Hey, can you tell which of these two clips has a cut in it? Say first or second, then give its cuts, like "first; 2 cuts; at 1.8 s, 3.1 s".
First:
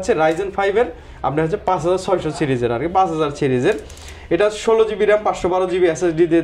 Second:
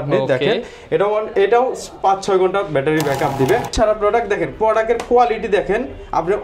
second; 1 cut; at 3.7 s